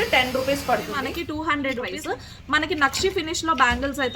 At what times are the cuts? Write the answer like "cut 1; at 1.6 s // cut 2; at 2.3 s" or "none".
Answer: cut 1; at 0.9 s // cut 2; at 2.0 s